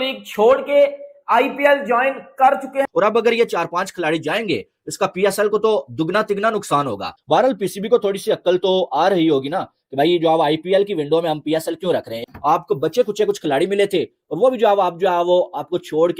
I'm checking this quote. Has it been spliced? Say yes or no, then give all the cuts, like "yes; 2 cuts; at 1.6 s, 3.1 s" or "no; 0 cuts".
yes; 1 cut; at 2.9 s